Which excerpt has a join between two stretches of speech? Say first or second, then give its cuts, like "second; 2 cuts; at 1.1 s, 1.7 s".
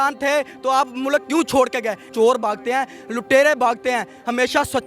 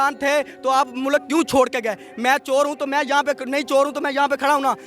first; 1 cut; at 2.1 s